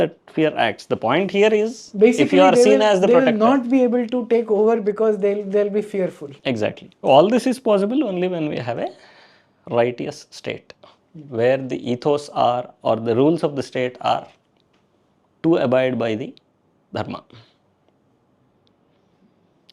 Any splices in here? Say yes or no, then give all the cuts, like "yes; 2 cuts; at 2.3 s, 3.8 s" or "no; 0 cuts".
yes; 1 cut; at 6.9 s